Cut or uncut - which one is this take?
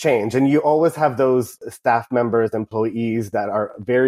uncut